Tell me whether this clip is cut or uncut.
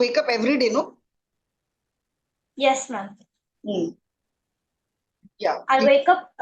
uncut